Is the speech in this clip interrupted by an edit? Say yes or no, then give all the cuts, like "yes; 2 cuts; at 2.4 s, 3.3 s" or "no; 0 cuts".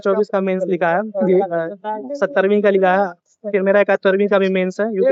no; 0 cuts